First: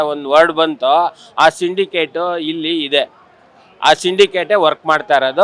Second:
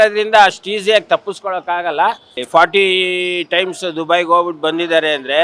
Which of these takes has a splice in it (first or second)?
second